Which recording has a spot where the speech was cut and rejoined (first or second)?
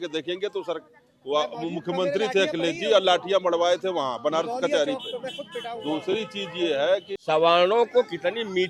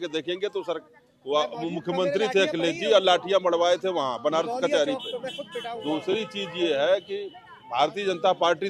first